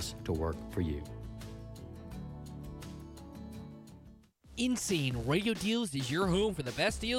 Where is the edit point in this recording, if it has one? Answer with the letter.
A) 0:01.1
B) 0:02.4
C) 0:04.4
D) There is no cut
C